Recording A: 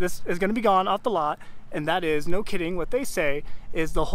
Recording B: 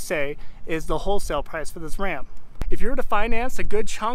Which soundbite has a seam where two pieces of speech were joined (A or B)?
B